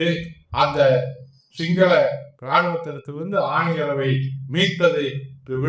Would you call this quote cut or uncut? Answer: uncut